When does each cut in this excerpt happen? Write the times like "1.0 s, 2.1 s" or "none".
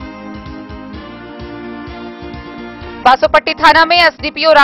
none